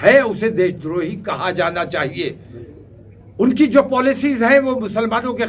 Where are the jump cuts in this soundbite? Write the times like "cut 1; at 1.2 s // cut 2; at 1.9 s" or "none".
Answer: none